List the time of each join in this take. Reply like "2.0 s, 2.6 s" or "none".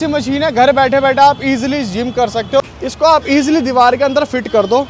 2.6 s